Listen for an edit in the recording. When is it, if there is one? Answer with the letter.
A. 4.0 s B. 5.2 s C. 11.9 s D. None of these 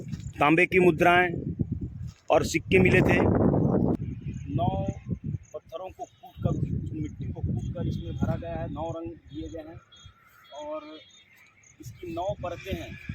A